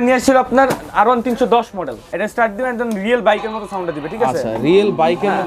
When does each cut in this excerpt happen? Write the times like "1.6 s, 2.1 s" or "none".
2.0 s